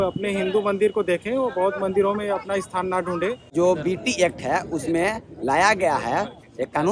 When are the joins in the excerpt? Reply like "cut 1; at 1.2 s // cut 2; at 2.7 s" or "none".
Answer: cut 1; at 3.4 s